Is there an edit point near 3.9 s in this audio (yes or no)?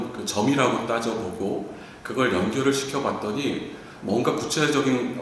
no